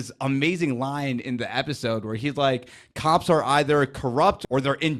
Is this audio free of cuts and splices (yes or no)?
yes